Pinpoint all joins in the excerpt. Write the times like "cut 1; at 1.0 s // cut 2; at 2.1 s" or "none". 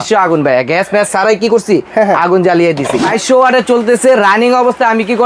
cut 1; at 3.1 s